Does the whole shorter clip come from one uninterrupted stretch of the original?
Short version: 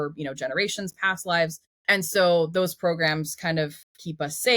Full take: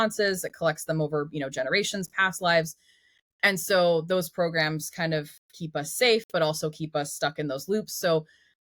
no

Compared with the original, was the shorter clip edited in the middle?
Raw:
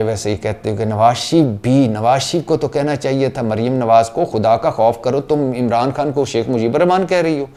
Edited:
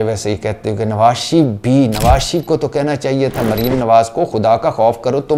no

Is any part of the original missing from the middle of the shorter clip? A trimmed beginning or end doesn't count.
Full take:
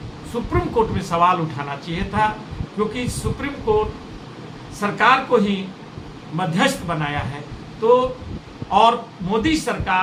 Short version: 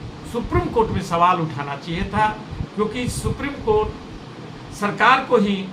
no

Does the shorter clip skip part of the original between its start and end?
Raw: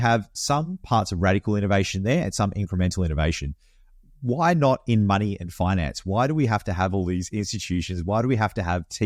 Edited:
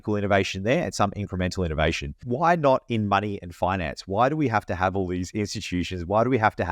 yes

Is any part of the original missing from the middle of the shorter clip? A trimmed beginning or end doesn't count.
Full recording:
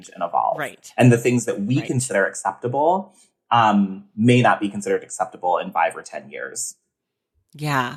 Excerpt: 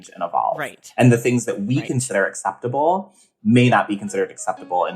yes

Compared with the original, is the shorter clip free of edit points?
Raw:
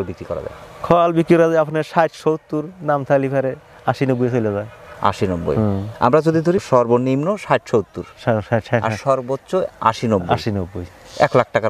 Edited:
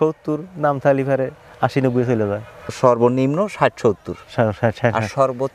no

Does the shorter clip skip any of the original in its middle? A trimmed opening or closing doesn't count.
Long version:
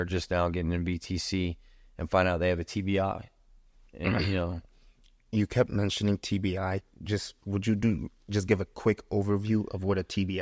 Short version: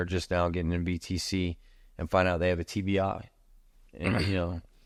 no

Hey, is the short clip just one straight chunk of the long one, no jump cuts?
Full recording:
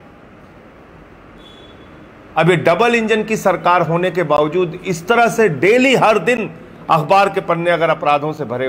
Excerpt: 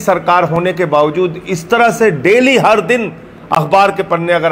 yes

